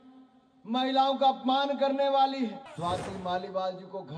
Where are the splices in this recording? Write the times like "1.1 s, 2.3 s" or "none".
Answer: 2.7 s